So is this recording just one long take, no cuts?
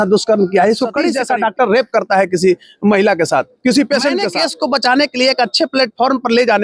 no; 2 cuts; at 1.1 s, 4.3 s

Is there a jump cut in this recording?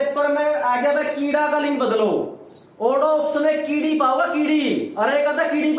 no; 0 cuts

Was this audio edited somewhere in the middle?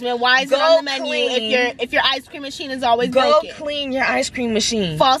no; 0 cuts

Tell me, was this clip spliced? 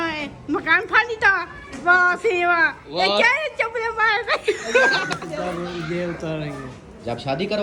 yes; 1 cut; at 5.2 s

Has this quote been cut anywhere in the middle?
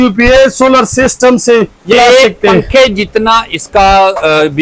yes; 1 cut; at 1.9 s

